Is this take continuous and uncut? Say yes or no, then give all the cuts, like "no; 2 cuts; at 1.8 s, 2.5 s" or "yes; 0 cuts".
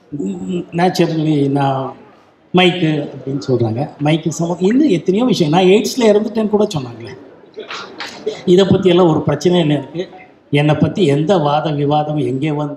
yes; 0 cuts